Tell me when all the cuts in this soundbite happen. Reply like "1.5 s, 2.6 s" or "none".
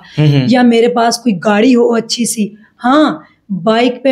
none

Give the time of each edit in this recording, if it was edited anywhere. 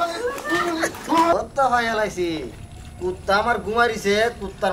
1.3 s

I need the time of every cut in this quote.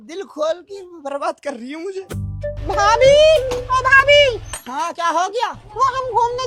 none

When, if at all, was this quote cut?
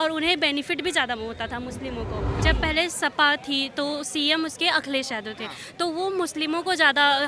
2.3 s

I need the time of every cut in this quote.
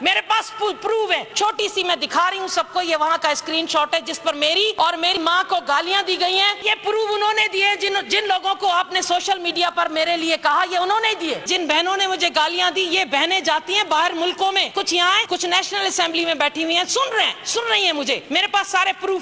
1.3 s, 4.7 s, 6.6 s, 11.5 s, 15.1 s, 18.2 s

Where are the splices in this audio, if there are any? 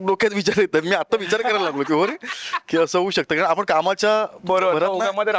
none

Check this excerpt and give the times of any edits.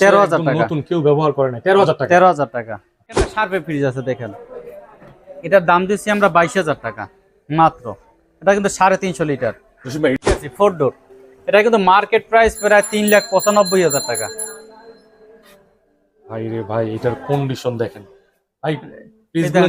3.3 s, 10.4 s

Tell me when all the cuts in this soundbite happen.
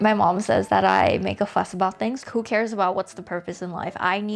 2.2 s

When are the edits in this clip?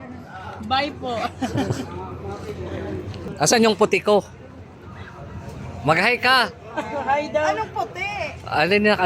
3.3 s

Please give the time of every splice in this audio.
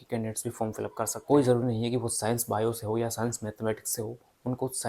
1.1 s

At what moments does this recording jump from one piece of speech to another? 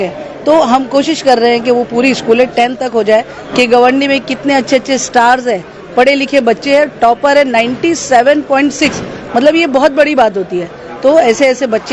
3.4 s

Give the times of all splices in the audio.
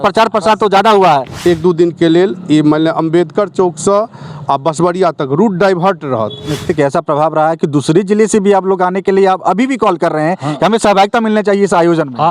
1.3 s, 6.7 s

